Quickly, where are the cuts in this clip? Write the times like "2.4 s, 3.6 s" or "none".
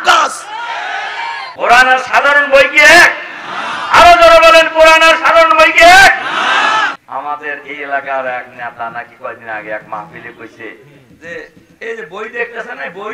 1.5 s, 6.9 s

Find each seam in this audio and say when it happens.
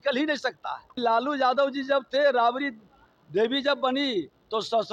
0.9 s

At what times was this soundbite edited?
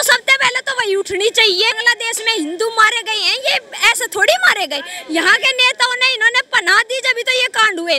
1.9 s

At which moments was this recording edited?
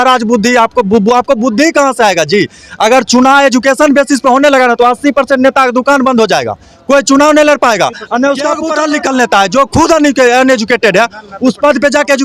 8.6 s

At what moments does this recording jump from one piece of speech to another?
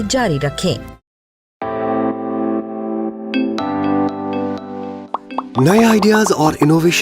1.4 s

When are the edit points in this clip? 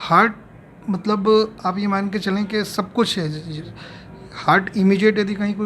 none

